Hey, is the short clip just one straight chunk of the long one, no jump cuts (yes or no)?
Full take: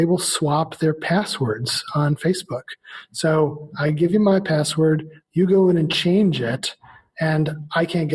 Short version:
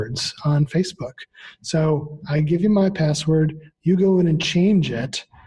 yes